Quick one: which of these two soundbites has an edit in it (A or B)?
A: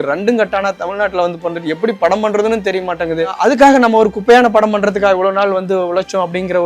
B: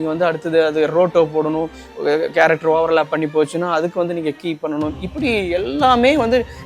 A